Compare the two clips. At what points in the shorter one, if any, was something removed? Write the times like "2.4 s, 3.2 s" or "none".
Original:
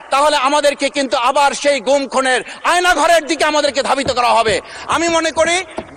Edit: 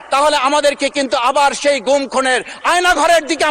none